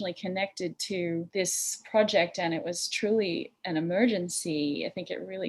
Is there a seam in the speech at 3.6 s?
no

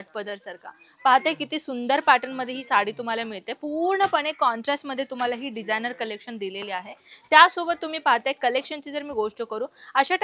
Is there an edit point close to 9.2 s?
no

